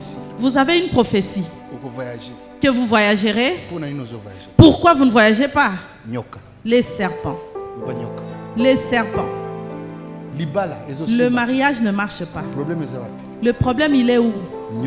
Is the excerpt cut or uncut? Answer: uncut